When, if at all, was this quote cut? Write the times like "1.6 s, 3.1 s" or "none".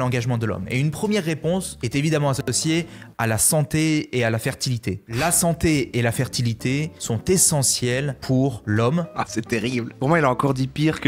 none